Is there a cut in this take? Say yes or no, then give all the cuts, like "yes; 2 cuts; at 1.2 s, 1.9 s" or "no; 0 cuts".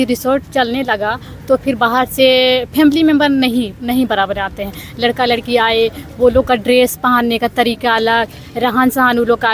no; 0 cuts